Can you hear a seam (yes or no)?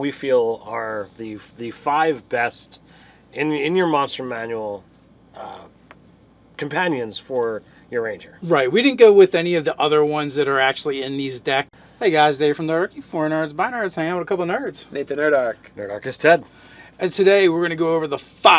no